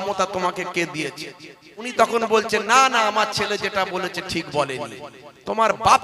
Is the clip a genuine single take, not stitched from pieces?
no; 1 cut; at 1.8 s

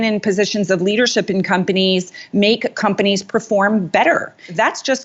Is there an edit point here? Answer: no; 0 cuts

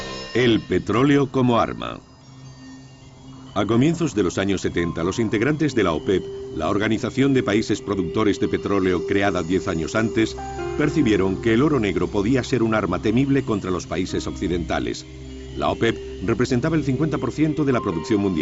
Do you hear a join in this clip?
yes; 1 cut; at 16.1 s

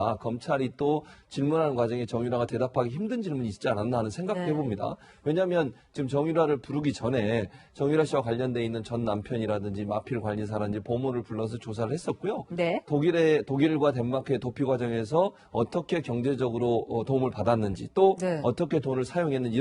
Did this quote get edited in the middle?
yes; 1 cut; at 2.0 s

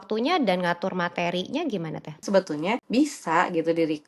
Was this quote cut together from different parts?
yes; 2 cuts; at 2.1 s, 2.8 s

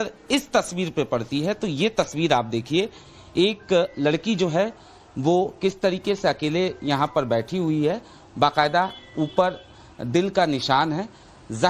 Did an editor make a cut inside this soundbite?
no; 0 cuts

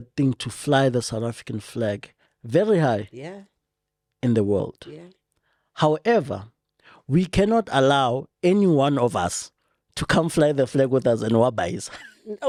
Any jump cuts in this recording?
no; 0 cuts

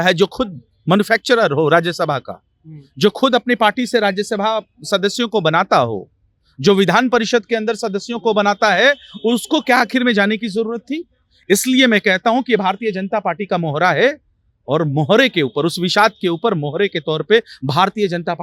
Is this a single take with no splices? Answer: yes; 0 cuts

